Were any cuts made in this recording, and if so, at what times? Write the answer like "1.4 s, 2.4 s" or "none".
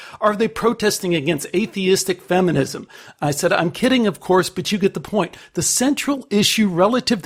none